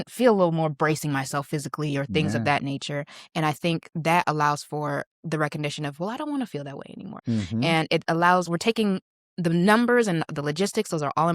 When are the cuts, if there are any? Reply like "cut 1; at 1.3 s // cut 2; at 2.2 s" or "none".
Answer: cut 1; at 5.1 s // cut 2; at 7.1 s